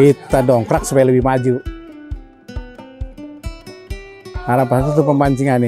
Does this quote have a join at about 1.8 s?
no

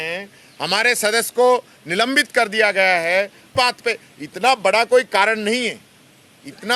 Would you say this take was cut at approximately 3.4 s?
yes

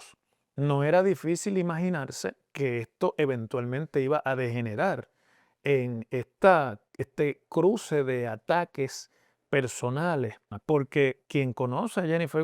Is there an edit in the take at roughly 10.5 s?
yes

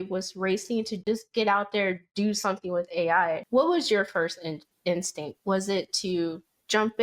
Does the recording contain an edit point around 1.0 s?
yes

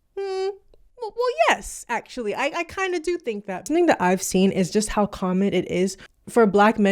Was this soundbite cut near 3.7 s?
yes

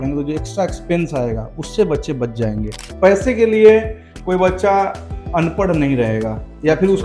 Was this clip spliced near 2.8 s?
yes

